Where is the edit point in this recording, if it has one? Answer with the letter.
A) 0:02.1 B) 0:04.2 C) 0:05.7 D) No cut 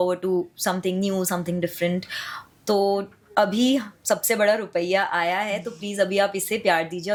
D